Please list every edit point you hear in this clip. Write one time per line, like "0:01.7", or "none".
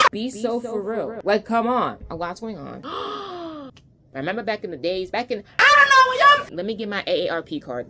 0:02.8